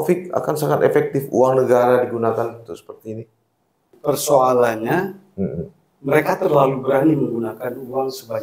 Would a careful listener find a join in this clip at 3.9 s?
yes; 1 cut; at 3.9 s

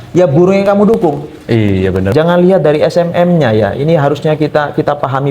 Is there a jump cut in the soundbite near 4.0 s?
no; 1 cut; at 2.1 s

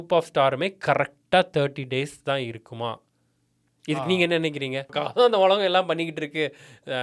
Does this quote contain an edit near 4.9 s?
yes; 1 cut; at 4.9 s

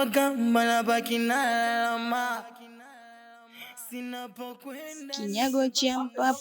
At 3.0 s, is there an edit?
no; 1 cut; at 4.9 s

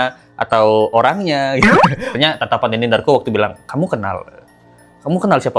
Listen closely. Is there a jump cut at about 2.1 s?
yes; 1 cut; at 2.1 s

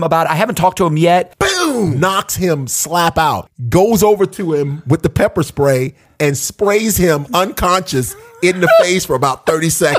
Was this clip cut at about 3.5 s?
yes; 2 cuts; at 1.7 s, 3.5 s

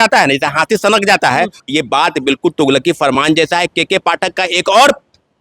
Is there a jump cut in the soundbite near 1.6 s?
yes; 1 cut; at 1.6 s

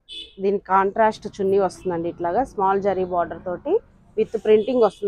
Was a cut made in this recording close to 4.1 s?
no; 0 cuts

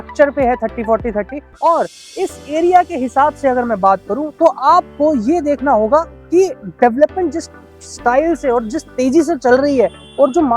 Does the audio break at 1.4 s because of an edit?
yes; 1 cut; at 1.4 s

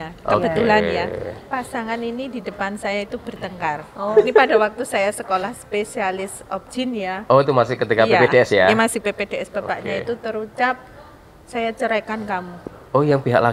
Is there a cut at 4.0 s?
yes; 2 cuts; at 1.4 s, 4.0 s

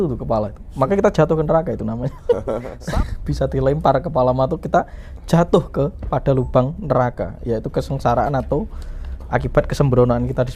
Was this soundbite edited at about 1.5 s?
no; 1 cut; at 2.8 s

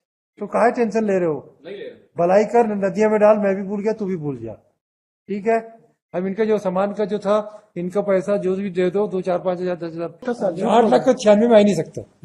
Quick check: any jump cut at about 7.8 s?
no; 1 cut; at 10.3 s

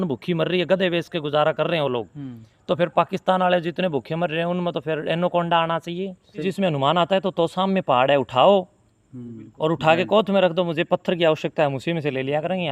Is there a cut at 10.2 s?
no; 1 cut; at 6.4 s

